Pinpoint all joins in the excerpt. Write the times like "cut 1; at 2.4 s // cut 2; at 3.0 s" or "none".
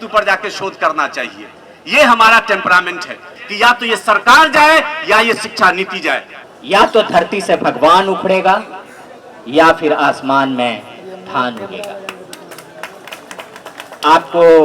cut 1; at 3.3 s // cut 2; at 6.3 s